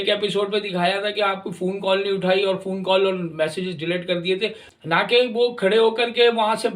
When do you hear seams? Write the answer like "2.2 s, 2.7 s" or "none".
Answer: 4.7 s